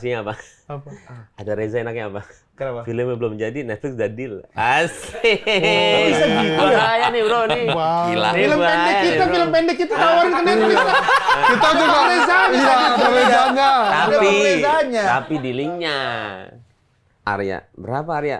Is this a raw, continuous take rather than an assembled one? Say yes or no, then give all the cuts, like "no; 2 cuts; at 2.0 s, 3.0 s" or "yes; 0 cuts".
yes; 0 cuts